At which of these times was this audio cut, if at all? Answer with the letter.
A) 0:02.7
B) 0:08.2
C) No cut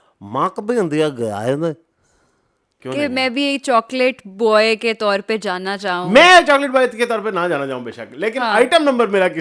A